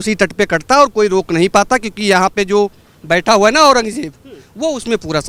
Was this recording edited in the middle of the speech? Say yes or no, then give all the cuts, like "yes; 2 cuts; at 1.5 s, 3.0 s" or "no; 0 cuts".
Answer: no; 0 cuts